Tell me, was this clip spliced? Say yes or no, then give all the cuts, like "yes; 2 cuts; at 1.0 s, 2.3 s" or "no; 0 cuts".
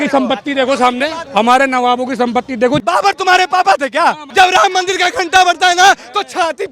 yes; 3 cuts; at 1.2 s, 2.8 s, 4.2 s